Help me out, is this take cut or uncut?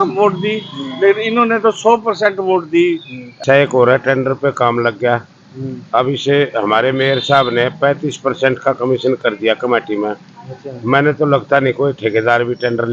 cut